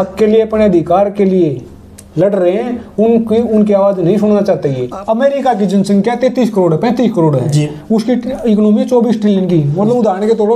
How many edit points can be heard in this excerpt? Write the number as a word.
one